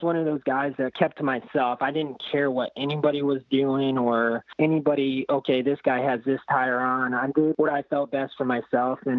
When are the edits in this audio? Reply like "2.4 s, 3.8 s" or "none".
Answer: 0.9 s, 4.5 s, 7.6 s